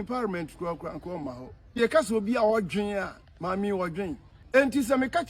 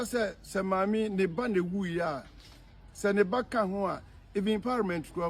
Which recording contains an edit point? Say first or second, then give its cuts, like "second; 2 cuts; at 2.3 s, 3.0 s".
first; 2 cuts; at 1.8 s, 4.3 s